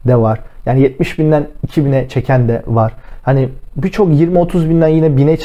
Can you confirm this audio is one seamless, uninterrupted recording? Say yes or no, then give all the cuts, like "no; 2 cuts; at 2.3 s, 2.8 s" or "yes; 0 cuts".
yes; 0 cuts